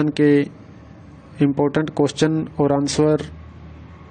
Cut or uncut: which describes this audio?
cut